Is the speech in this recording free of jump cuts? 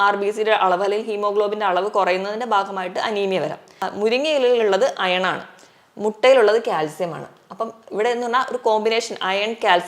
no; 1 cut; at 3.9 s

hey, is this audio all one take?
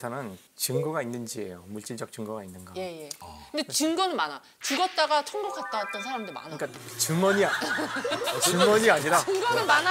yes; 0 cuts

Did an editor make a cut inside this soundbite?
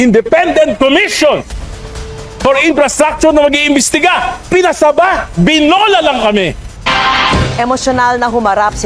yes; 1 cut; at 6.7 s

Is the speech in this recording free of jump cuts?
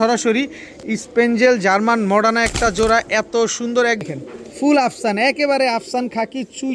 no; 1 cut; at 4.0 s

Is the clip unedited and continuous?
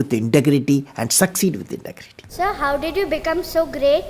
no; 1 cut; at 2.3 s

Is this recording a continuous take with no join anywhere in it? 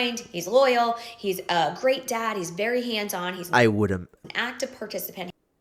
yes; 0 cuts

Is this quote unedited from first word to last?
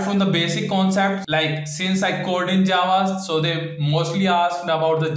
yes; 0 cuts

